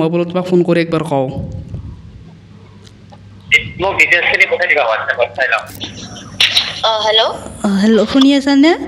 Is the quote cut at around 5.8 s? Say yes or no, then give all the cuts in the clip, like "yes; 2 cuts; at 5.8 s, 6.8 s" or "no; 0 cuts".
yes; 1 cut; at 5.8 s